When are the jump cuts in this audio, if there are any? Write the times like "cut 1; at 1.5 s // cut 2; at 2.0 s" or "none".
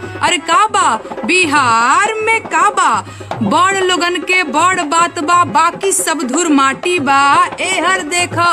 cut 1; at 3.6 s

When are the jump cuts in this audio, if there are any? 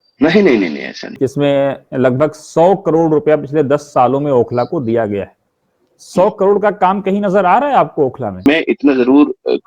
cut 1; at 1.2 s // cut 2; at 8.5 s

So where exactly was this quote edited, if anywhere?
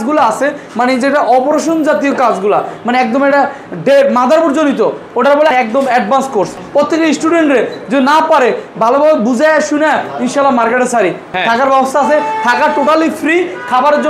cut 1; at 5.5 s // cut 2; at 6.6 s // cut 3; at 11.3 s

